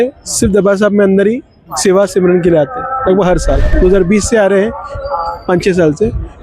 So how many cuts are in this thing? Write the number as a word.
one